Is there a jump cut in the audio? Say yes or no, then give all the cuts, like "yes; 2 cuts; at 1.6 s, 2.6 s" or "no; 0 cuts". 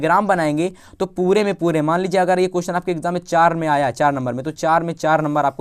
no; 0 cuts